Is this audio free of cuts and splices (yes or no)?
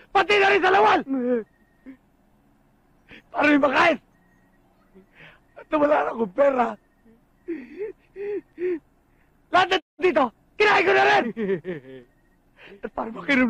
yes